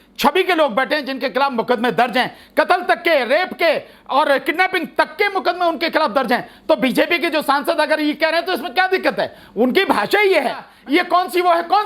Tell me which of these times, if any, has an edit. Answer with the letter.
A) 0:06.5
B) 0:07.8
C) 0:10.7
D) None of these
C